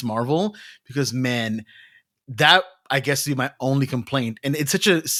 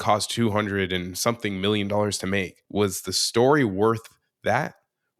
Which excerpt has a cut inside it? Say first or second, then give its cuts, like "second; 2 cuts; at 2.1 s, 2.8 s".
second; 1 cut; at 2.6 s